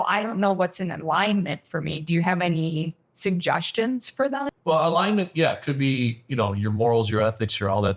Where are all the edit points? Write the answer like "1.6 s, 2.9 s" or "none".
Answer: 4.5 s